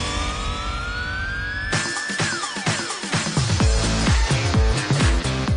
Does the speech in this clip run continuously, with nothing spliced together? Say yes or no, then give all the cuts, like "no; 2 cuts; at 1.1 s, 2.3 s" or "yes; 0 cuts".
yes; 0 cuts